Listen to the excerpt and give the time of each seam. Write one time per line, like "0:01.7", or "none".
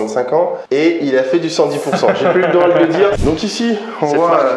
0:03.2